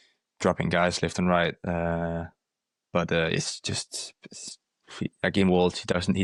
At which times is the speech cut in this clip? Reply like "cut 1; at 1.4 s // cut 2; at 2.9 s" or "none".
none